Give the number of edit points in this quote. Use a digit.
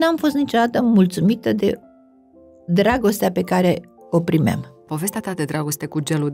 1